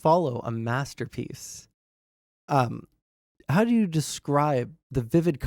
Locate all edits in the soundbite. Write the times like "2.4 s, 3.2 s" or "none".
3.3 s